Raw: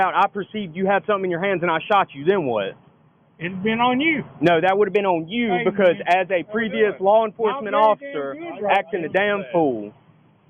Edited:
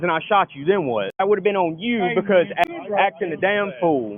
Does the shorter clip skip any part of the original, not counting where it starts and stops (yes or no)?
yes